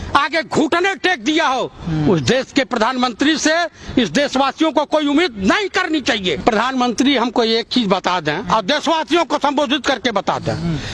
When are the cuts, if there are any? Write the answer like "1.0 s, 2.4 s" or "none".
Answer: 6.3 s